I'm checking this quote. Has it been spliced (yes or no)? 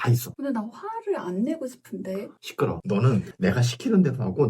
yes